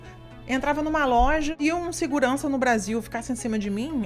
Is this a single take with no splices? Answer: no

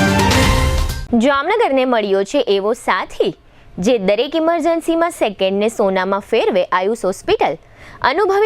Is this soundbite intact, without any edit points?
no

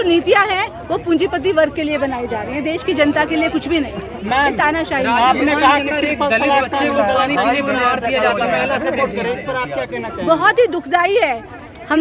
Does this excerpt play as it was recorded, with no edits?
yes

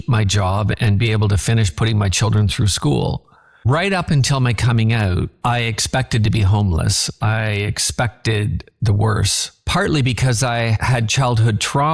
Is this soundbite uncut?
yes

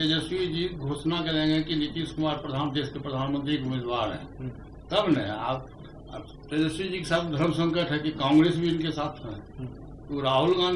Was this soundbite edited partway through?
no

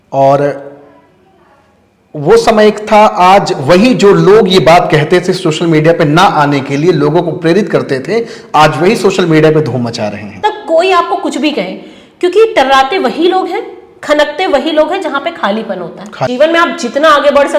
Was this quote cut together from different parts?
yes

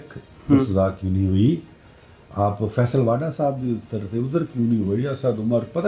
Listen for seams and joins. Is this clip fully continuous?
yes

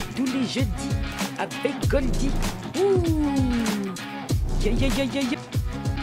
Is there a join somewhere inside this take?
no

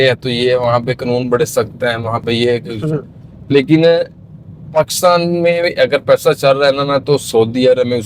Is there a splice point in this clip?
no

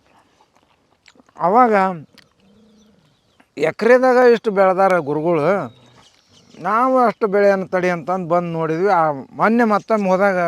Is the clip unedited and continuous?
yes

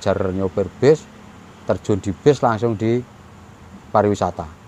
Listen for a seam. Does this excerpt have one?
no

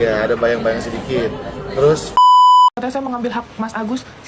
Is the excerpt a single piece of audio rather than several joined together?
no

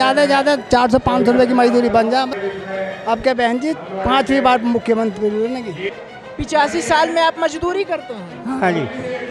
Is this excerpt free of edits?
no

